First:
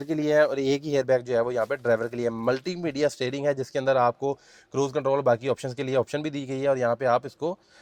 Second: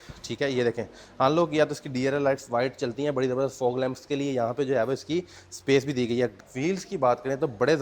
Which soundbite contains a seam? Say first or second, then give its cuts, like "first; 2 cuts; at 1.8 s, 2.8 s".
second; 1 cut; at 6.3 s